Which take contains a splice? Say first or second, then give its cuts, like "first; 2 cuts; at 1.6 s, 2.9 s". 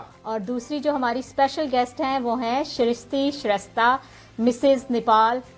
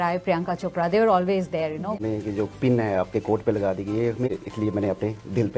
second; 2 cuts; at 2.0 s, 4.3 s